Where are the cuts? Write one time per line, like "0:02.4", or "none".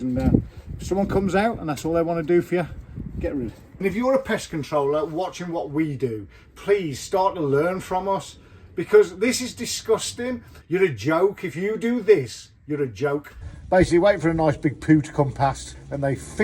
0:03.7
0:10.5
0:13.5